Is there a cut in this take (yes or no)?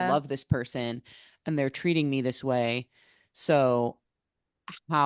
no